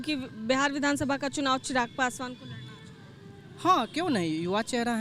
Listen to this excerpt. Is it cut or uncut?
uncut